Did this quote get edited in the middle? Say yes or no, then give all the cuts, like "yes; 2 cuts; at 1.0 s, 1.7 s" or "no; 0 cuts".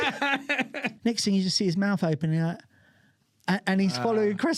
yes; 1 cut; at 0.9 s